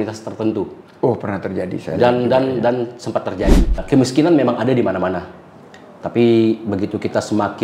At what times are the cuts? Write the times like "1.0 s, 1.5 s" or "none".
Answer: 3.8 s

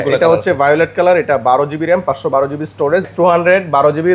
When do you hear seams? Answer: 3.0 s

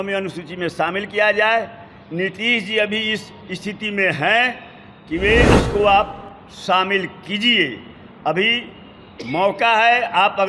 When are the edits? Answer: 5.5 s

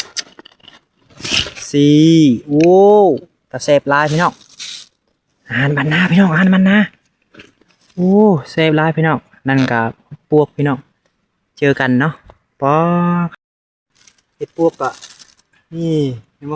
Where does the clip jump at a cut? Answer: 13.4 s

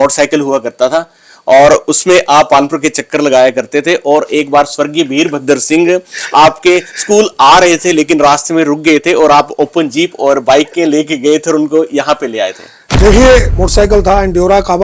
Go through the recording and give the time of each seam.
13.5 s

